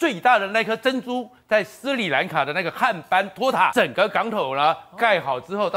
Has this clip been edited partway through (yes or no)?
yes